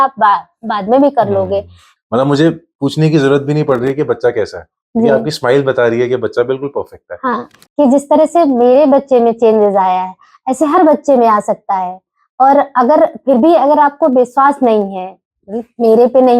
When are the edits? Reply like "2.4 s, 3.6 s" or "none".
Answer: 1.8 s, 7.5 s

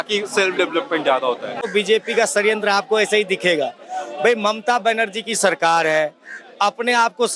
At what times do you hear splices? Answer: 1.7 s

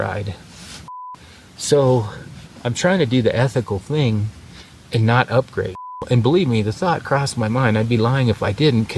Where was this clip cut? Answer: 1.1 s, 6.0 s

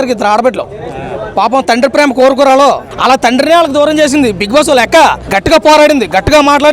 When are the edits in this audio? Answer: 2.9 s, 5.3 s

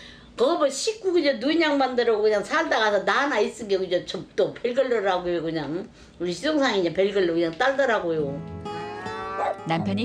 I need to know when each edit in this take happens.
8.5 s

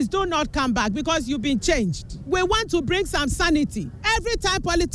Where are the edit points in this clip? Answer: 2.1 s, 3.9 s

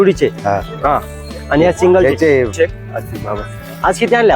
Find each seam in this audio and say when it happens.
2.5 s

